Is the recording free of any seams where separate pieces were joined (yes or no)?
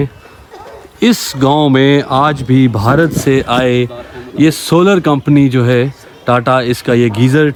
yes